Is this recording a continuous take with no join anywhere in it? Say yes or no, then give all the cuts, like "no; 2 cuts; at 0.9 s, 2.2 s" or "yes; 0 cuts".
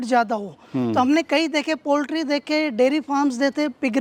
yes; 0 cuts